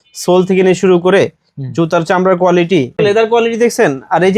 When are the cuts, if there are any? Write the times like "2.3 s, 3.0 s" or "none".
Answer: 3.0 s